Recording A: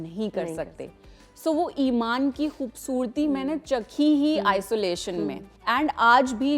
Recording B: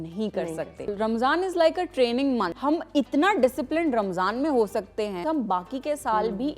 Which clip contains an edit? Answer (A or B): B